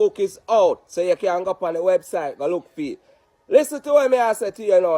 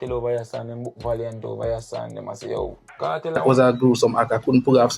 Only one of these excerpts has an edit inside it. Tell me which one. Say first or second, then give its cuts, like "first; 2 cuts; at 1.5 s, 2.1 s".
second; 1 cut; at 3.4 s